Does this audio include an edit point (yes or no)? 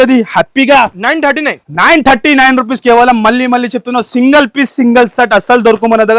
no